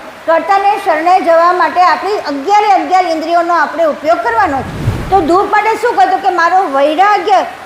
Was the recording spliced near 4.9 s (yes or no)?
yes